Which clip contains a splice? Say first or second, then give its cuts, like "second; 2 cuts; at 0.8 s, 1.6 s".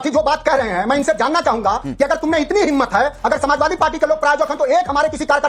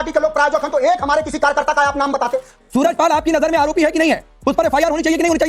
second; 1 cut; at 2.5 s